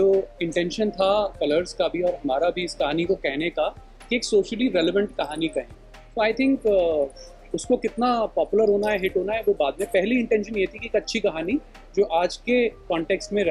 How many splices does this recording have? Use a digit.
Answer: 0